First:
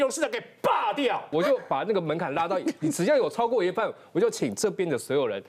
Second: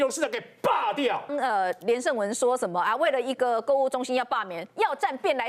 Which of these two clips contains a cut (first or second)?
first